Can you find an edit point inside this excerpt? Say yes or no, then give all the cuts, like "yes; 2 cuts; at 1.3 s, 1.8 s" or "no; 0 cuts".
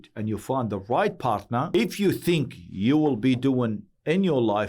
yes; 1 cut; at 1.7 s